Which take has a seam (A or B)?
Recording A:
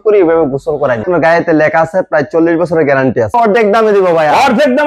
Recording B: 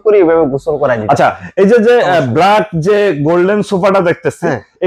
A